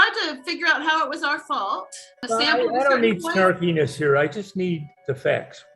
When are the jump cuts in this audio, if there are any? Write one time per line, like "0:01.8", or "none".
0:02.2